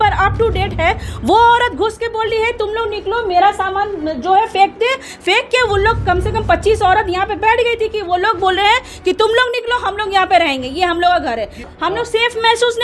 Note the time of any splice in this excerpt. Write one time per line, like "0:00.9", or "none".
0:11.6